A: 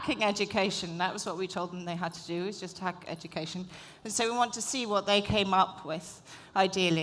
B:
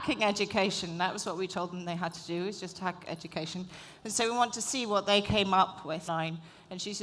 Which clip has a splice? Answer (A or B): A